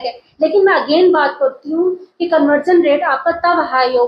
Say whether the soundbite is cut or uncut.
uncut